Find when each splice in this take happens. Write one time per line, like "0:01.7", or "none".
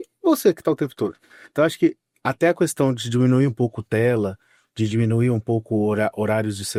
none